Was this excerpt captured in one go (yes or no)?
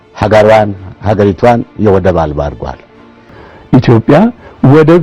no